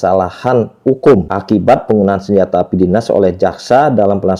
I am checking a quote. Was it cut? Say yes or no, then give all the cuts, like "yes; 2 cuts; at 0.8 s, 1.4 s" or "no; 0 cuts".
no; 0 cuts